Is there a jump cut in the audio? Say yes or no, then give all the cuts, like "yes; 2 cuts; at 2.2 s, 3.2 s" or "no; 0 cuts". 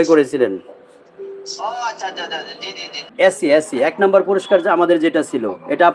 yes; 1 cut; at 3.0 s